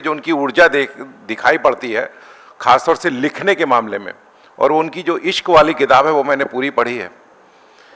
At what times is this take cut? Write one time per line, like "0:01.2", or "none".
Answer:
none